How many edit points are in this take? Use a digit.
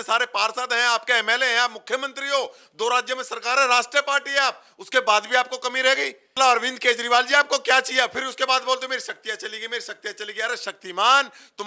1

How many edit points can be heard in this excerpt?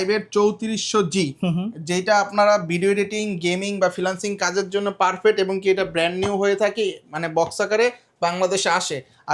0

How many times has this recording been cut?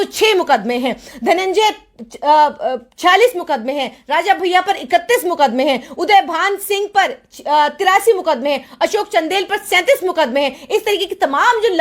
0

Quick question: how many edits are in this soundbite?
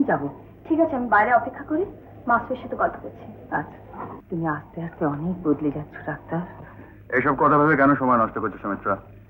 1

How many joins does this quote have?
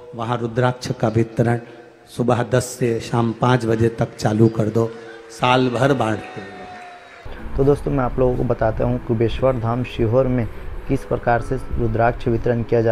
1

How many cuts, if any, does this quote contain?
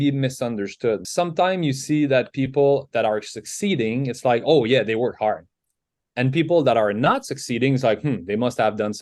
1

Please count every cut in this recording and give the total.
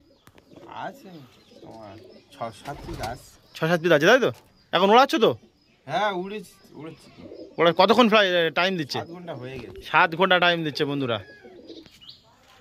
0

